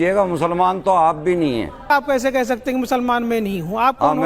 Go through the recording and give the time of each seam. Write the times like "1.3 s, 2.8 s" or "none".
1.9 s